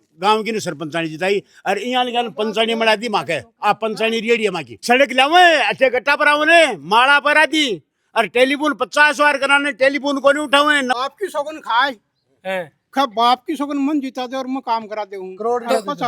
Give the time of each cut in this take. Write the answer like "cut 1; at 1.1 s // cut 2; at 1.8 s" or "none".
cut 1; at 4.8 s // cut 2; at 11.0 s